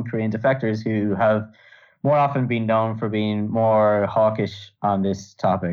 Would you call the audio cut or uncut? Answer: uncut